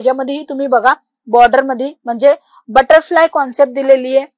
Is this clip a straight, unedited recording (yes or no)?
yes